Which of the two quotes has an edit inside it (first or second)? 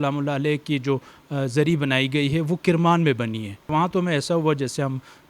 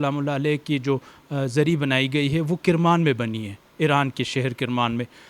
first